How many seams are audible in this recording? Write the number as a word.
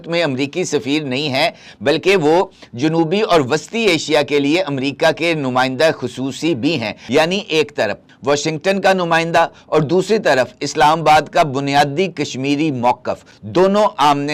zero